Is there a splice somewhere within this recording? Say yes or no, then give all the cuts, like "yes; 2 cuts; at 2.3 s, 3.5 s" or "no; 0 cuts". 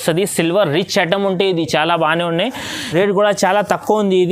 yes; 1 cut; at 2.8 s